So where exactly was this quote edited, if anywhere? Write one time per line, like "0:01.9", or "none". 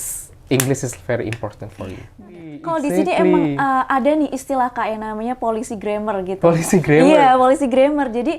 0:02.6